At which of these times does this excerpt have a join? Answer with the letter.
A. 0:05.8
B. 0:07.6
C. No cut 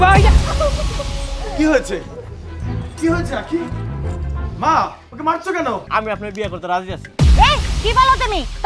A